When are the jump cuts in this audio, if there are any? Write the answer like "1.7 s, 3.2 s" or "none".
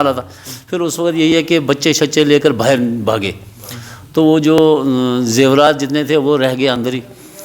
none